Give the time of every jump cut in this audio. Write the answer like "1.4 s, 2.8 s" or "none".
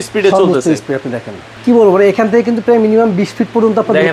1.5 s